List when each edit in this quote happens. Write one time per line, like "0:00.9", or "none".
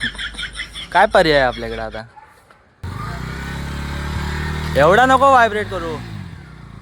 0:02.8